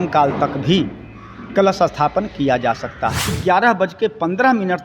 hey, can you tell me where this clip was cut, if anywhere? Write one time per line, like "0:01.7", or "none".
0:03.4